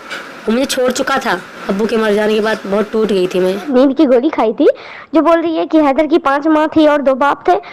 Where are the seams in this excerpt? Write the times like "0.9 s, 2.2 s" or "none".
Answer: 1.5 s, 3.7 s